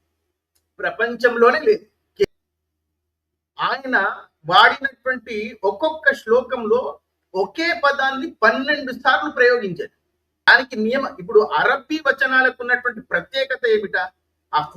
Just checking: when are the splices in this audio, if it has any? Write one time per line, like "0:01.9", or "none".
0:02.2
0:10.5